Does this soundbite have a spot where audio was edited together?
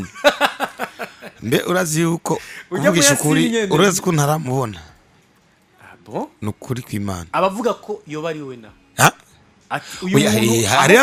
no; 0 cuts

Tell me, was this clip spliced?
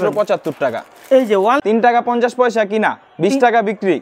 yes; 1 cut; at 1.6 s

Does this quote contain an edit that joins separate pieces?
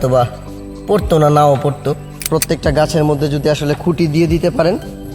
yes; 1 cut; at 2.2 s

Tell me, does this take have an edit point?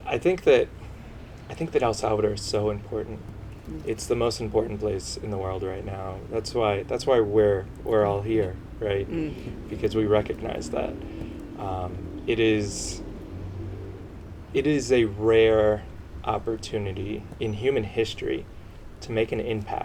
no; 0 cuts

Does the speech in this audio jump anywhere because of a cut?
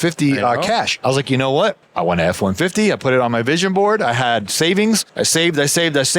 yes; 2 cuts; at 0.9 s, 5.1 s

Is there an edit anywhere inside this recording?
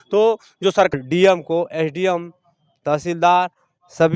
yes; 1 cut; at 0.9 s

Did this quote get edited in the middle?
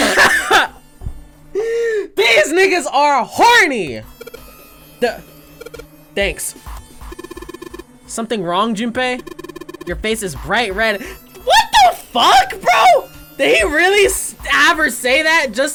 no; 0 cuts

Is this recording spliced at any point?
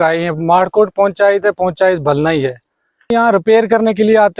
yes; 1 cut; at 3.1 s

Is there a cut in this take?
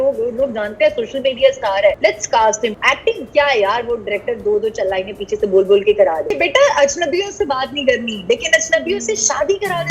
yes; 3 cuts; at 2.0 s, 2.8 s, 6.3 s

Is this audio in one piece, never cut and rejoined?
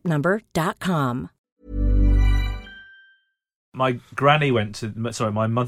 no; 1 cut; at 3.7 s

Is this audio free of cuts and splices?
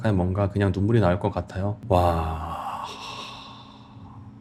yes; 0 cuts

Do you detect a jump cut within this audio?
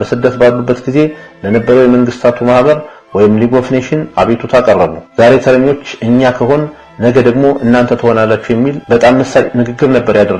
no; 0 cuts

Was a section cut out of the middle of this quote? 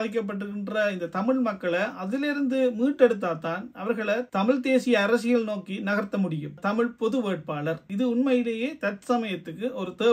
yes; 1 cut; at 6.6 s

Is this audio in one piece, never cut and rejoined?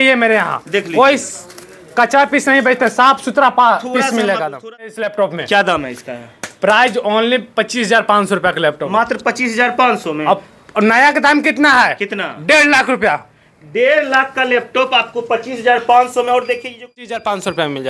no; 2 cuts; at 4.9 s, 17.0 s

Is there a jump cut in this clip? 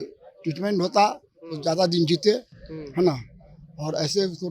no; 0 cuts

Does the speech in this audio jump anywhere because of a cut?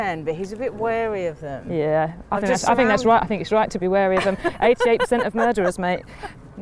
no; 0 cuts

